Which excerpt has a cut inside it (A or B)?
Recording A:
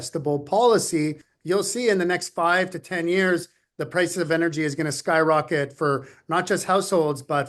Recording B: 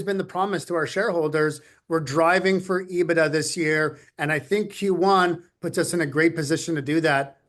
A